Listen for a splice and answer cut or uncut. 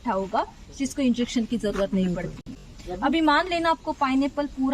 uncut